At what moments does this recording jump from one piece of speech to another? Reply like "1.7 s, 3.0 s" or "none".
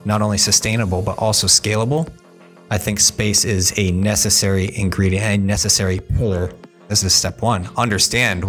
6.9 s